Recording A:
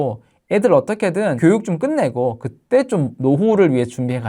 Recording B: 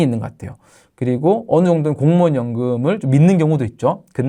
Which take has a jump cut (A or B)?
A